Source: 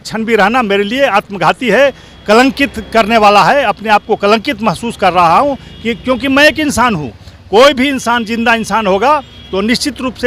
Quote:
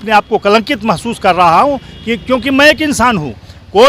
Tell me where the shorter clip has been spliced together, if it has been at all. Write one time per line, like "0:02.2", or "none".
none